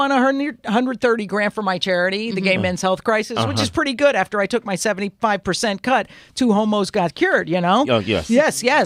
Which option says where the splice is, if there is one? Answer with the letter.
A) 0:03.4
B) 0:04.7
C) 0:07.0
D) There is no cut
D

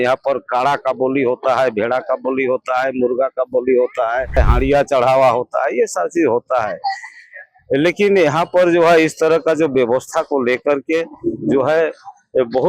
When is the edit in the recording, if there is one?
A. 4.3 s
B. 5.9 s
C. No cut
A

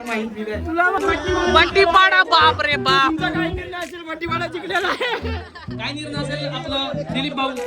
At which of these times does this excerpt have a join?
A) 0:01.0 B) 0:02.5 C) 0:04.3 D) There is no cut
A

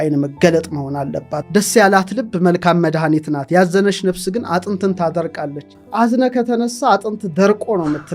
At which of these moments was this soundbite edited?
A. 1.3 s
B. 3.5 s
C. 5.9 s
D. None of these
A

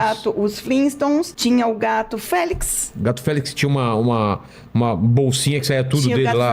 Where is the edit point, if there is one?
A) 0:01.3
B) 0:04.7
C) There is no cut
A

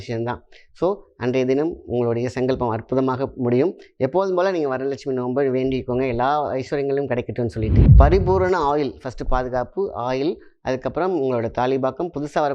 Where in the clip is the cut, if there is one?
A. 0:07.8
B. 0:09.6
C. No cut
A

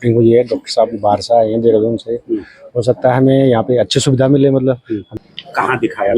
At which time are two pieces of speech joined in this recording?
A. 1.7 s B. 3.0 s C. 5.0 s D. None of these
C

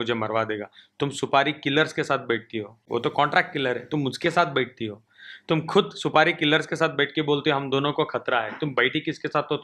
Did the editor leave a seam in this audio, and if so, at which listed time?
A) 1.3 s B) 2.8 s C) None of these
B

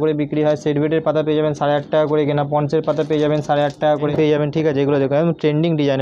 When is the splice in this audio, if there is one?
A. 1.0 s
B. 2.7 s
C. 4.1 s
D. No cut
C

